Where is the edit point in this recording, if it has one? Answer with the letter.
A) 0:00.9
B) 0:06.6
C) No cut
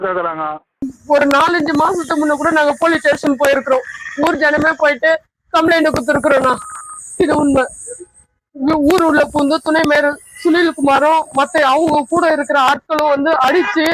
A